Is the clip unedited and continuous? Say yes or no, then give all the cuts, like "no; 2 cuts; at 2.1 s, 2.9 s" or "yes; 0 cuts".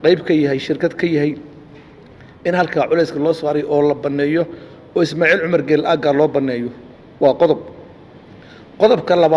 yes; 0 cuts